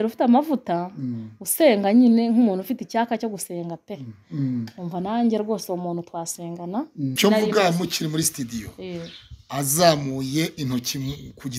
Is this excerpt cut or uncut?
cut